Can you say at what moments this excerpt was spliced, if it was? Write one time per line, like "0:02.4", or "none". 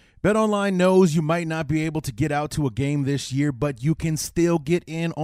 none